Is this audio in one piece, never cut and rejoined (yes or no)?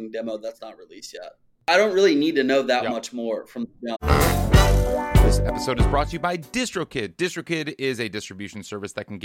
no